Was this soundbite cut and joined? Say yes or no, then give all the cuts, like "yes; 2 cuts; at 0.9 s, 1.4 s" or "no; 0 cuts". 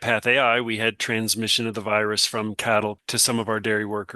yes; 1 cut; at 3.0 s